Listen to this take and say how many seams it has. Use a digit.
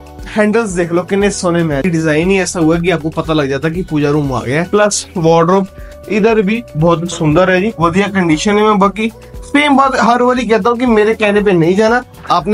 3